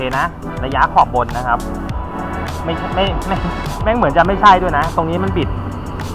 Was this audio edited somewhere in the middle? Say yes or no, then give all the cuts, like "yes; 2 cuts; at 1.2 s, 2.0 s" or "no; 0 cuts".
no; 0 cuts